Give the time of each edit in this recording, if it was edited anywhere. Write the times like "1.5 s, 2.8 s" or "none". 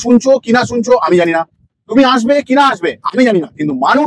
none